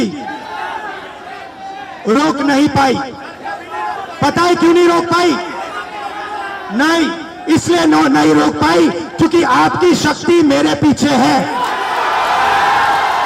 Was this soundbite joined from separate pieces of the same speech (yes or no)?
no